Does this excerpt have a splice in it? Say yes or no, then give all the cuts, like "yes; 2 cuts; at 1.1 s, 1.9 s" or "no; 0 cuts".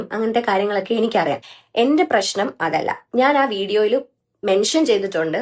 no; 0 cuts